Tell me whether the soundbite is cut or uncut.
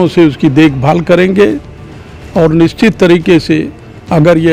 uncut